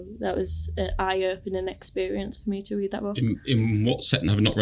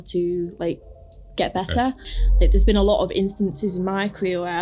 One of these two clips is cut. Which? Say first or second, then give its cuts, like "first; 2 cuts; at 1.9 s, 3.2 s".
second; 1 cut; at 2.1 s